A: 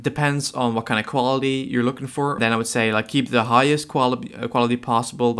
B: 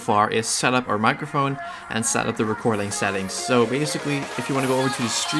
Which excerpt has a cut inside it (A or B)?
A